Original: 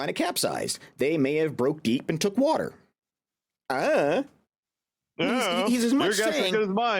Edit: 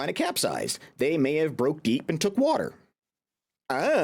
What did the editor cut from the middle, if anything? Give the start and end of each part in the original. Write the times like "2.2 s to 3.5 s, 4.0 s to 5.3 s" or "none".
none

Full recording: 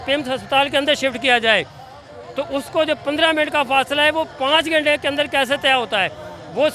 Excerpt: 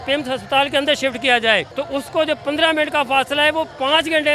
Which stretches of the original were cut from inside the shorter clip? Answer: 1.7 s to 2.3 s

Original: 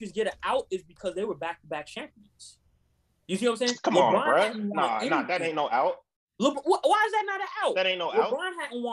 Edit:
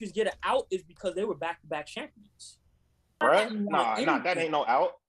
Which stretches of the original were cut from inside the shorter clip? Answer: 3.2 s to 4.2 s

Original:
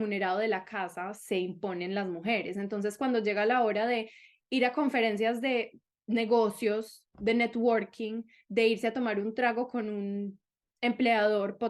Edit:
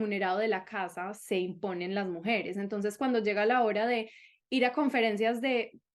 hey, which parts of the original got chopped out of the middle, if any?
none

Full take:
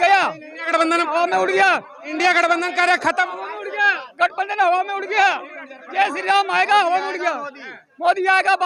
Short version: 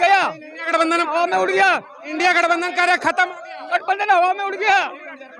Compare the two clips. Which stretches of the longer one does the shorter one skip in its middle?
3.5 s to 4.0 s

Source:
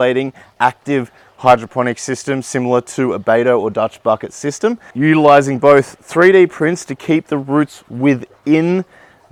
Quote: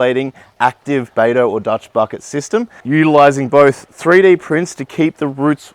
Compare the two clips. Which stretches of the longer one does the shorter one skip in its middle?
1.1 s to 3.2 s

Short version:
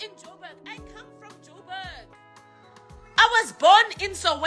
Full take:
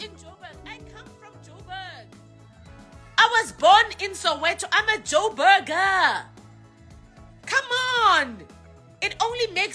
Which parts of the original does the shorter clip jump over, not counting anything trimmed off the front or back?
none

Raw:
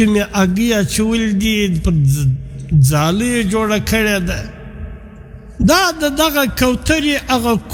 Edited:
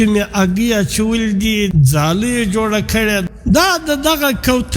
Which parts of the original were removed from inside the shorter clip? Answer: 1.7 s to 2.7 s, 4.3 s to 5.5 s

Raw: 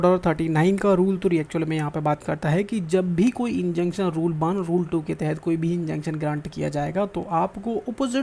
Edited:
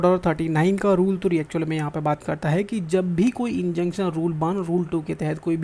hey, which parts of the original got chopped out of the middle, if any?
none

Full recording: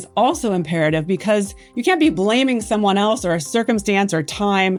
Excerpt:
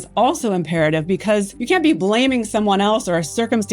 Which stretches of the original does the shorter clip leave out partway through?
1.5 s to 1.7 s

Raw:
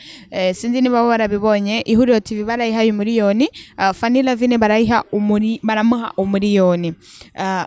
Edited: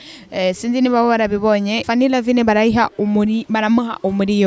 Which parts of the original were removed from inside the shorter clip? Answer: 1.8 s to 4.0 s

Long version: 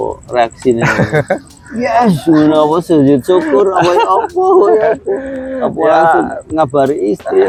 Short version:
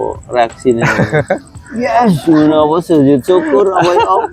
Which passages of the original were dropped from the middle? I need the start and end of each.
none

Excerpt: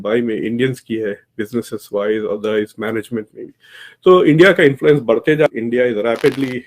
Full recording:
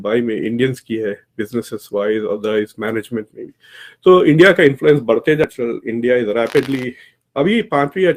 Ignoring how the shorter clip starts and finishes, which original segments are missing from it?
5.5 s to 5.8 s

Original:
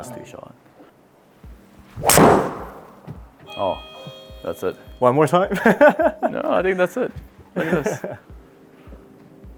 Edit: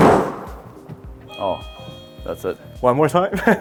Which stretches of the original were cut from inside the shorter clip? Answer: none

